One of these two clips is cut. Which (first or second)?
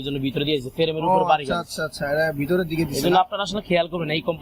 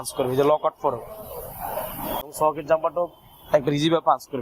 second